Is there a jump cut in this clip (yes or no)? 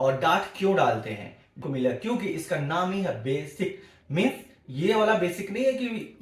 yes